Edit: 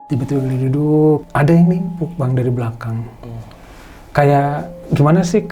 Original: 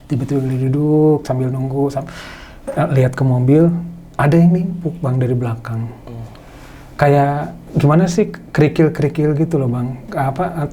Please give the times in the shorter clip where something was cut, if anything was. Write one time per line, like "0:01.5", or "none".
0:01.2